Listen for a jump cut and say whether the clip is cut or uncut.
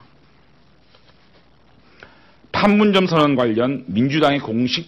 uncut